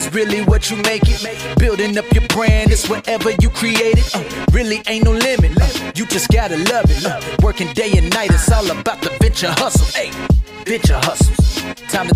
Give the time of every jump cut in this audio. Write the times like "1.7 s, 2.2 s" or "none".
none